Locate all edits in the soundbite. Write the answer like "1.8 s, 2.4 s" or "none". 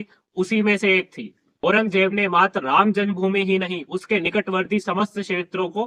none